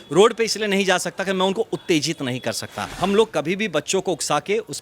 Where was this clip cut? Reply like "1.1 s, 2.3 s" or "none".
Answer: 2.9 s